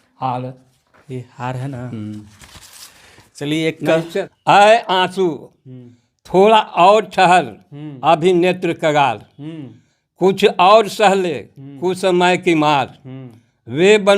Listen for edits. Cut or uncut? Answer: cut